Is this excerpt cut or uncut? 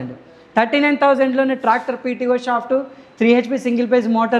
uncut